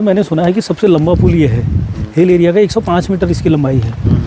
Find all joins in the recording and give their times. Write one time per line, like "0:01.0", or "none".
none